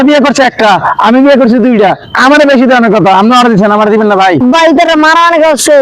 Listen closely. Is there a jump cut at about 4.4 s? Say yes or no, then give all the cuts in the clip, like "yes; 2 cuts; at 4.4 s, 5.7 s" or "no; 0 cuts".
yes; 1 cut; at 4.4 s